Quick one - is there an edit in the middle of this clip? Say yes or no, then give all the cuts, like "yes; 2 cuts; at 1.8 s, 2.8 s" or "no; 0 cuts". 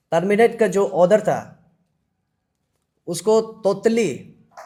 no; 0 cuts